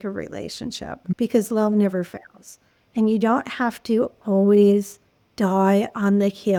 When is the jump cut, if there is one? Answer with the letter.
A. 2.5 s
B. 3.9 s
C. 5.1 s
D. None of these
D